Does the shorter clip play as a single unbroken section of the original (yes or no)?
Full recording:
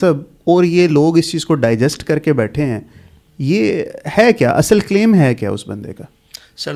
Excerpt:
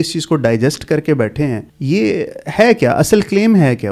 no